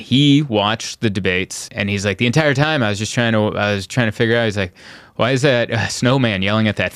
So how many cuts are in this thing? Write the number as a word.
one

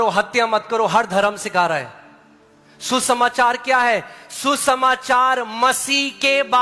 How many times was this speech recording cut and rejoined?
zero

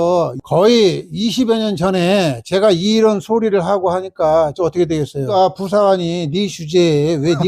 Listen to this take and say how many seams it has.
one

